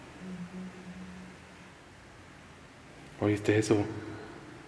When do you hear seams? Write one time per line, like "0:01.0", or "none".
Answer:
0:01.7